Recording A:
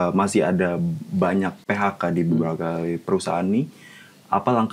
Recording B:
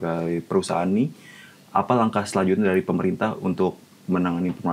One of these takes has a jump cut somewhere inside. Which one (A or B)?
A